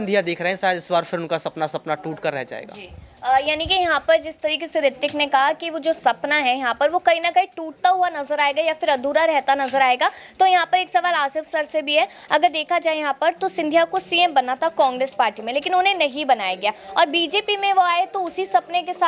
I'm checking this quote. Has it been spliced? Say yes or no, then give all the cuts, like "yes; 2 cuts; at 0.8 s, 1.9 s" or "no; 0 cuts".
no; 0 cuts